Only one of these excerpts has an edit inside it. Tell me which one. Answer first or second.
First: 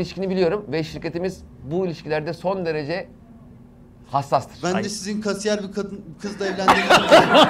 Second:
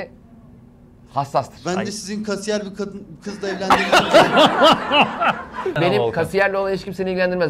second